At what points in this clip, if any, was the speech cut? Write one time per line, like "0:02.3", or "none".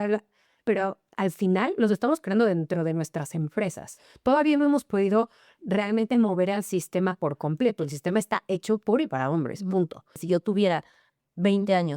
0:10.2